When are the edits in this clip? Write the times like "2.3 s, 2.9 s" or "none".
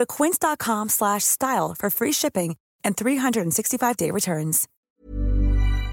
4.7 s